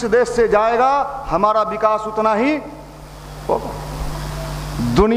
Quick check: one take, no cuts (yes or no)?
no